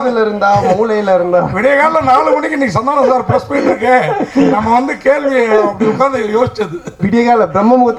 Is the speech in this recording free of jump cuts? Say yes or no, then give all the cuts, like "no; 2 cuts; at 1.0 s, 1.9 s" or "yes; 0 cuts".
yes; 0 cuts